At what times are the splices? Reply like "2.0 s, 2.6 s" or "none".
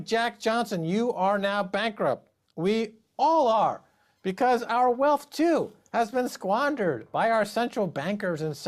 5.3 s